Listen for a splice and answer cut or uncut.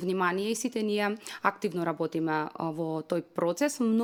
uncut